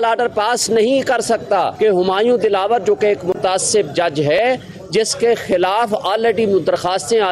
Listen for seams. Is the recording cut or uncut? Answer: cut